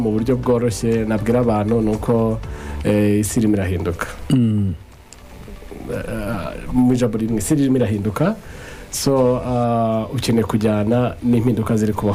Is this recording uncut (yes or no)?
yes